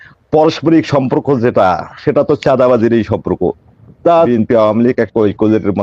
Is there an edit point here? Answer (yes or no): yes